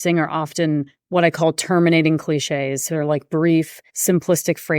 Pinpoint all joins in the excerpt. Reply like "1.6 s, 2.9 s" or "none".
1.0 s, 3.8 s